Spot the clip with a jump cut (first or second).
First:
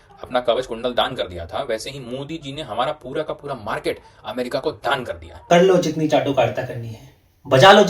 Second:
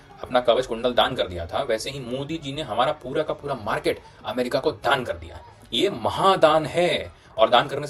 first